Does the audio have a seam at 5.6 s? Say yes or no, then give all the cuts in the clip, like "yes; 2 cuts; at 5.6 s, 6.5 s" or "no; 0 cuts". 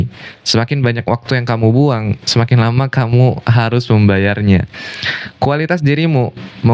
no; 0 cuts